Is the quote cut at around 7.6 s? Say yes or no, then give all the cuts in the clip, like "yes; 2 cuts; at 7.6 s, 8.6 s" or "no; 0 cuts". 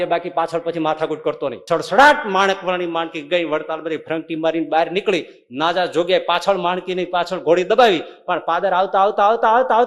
no; 1 cut; at 1.6 s